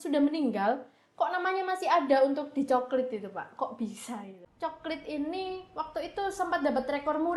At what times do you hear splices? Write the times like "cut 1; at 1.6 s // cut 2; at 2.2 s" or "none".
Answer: cut 1; at 4.4 s